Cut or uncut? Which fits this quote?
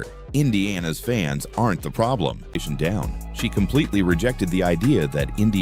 cut